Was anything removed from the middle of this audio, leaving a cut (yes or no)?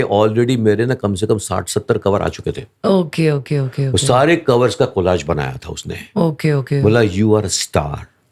no